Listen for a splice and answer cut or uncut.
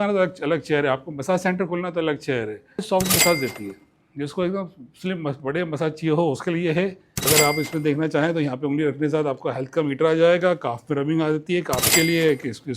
cut